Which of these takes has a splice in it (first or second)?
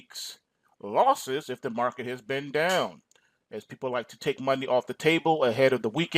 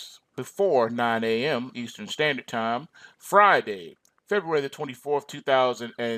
first